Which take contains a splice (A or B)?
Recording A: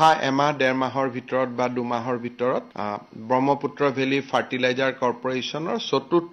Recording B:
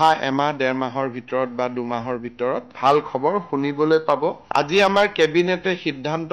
B